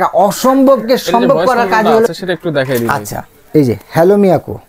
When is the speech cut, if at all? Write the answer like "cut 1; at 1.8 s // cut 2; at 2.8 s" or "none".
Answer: cut 1; at 2.1 s